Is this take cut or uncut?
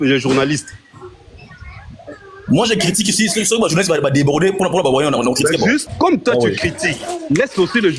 cut